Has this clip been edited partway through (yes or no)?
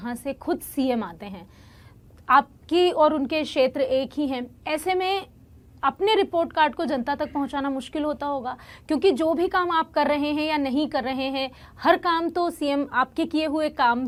no